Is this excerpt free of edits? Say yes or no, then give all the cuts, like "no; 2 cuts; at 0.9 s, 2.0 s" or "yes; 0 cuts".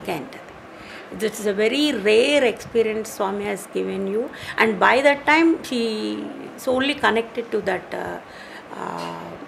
yes; 0 cuts